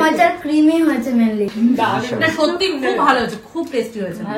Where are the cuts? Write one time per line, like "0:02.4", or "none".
0:01.5